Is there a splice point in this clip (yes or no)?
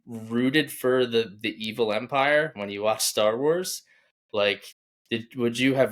no